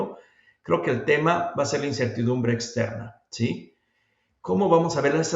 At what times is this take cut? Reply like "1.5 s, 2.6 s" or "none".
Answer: none